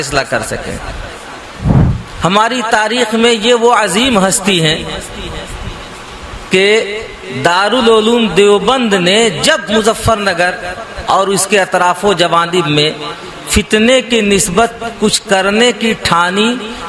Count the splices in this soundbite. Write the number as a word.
one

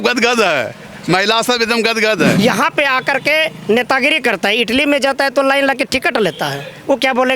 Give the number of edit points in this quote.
one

